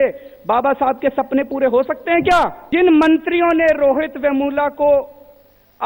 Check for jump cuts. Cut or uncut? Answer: cut